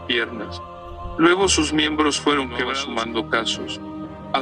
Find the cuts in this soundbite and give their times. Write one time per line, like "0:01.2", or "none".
0:02.8